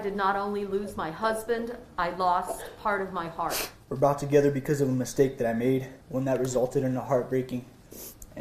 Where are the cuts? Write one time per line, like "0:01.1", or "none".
0:03.6
0:06.0